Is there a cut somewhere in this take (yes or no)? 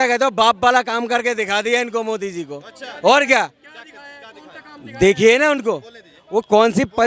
no